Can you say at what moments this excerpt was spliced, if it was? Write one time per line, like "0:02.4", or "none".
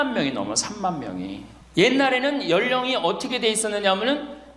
0:01.5